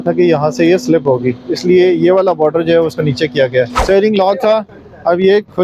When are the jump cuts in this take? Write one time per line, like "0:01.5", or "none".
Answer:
0:03.8